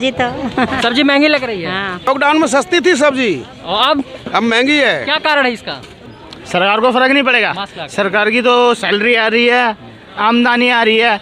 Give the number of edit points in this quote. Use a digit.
2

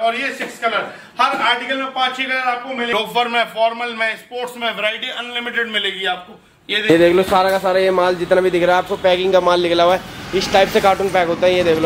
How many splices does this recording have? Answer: 2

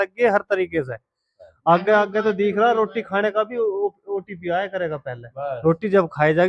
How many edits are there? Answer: 0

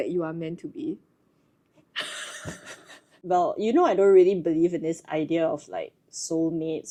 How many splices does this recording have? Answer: 0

